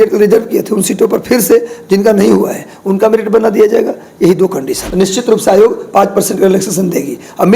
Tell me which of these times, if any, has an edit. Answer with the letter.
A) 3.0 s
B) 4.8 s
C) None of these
B